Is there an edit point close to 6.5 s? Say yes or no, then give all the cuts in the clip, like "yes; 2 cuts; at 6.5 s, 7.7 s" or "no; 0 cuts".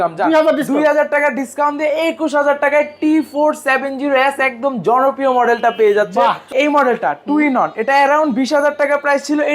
yes; 1 cut; at 6.5 s